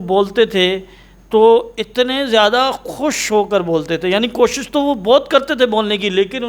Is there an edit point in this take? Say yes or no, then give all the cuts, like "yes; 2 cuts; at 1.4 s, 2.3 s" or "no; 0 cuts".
no; 0 cuts